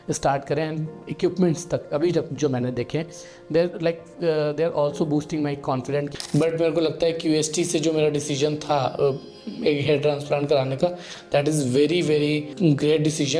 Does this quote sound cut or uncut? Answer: cut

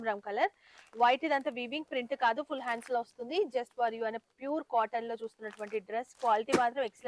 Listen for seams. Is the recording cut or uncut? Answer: uncut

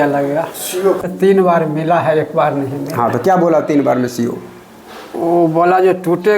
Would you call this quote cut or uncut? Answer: cut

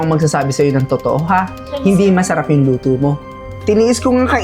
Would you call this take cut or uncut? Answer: uncut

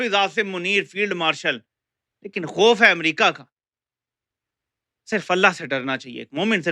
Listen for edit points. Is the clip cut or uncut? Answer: uncut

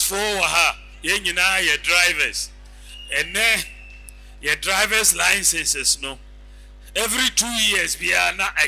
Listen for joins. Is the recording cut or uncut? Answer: uncut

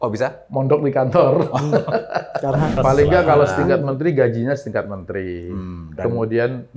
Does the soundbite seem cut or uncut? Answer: cut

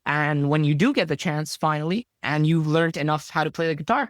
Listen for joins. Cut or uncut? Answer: cut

